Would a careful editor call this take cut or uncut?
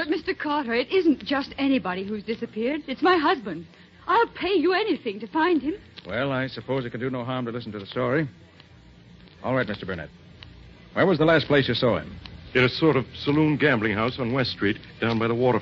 cut